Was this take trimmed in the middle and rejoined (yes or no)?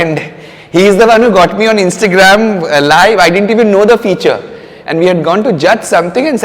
no